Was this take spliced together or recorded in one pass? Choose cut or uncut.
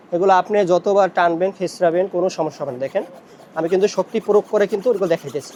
uncut